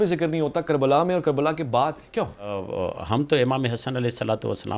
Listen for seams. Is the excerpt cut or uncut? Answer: cut